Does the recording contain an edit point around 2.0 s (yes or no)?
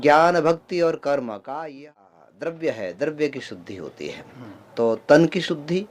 yes